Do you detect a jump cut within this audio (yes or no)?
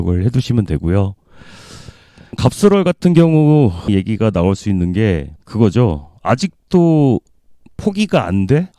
no